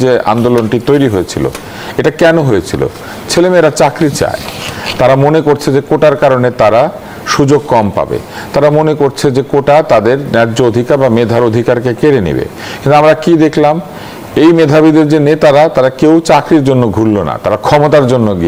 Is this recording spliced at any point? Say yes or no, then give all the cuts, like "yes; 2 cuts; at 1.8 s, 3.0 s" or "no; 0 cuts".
no; 0 cuts